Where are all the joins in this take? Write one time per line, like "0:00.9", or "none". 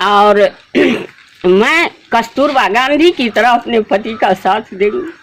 none

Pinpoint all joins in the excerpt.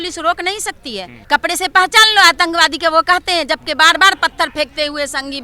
0:01.1

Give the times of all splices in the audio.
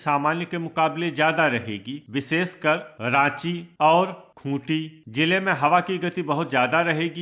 none

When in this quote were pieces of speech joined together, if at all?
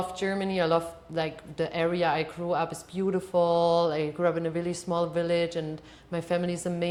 none

